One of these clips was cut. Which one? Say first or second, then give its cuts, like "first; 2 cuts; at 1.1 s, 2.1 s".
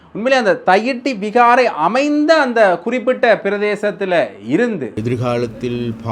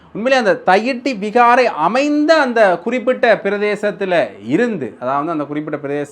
first; 1 cut; at 5.0 s